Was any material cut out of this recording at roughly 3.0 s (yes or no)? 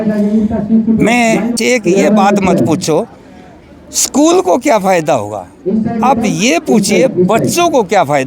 no